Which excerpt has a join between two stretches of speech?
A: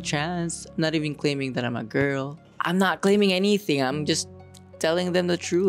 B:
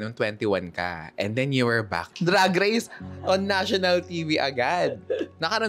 B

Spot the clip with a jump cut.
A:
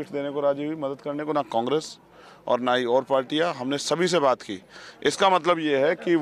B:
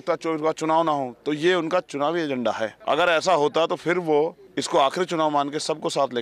B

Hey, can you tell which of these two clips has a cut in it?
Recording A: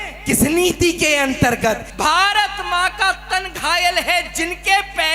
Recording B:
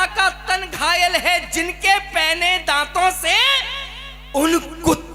A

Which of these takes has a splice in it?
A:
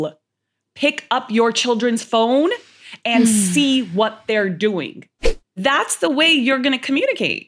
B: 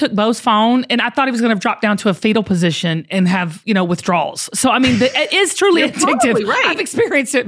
A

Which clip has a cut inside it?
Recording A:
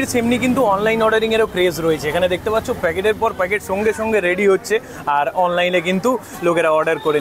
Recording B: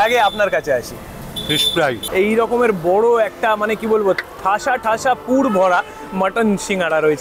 B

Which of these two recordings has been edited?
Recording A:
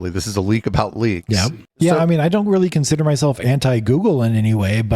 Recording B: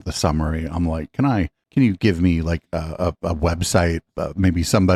A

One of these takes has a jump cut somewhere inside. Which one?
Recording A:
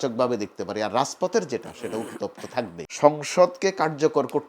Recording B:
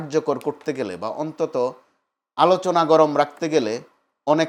A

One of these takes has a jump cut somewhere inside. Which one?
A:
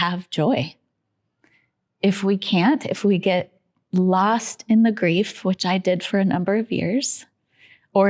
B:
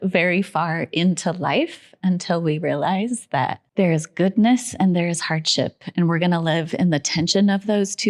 B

